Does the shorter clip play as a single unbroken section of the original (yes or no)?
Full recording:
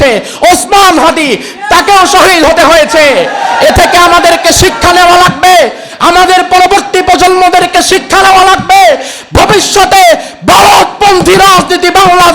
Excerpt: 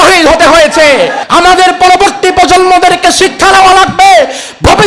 no